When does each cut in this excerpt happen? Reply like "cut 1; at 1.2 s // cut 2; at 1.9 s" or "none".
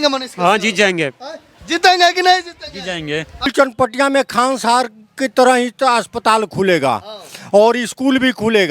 cut 1; at 3.5 s